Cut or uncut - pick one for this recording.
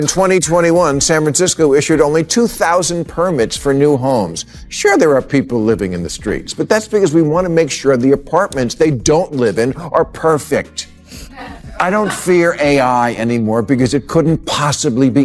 uncut